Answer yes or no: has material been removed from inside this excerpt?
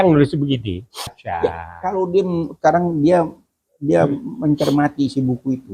yes